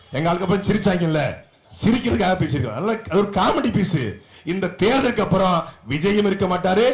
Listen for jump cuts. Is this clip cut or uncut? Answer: uncut